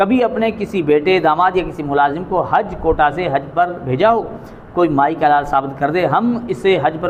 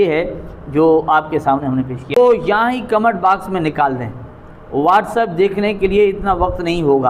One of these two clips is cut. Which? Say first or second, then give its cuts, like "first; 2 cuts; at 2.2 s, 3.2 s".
second; 1 cut; at 2.2 s